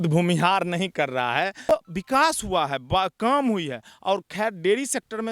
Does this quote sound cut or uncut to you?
cut